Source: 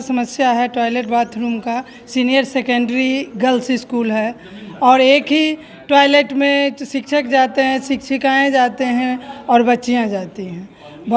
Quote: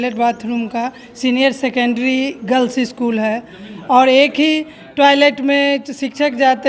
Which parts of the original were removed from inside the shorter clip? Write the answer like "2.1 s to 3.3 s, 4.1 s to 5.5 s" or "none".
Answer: none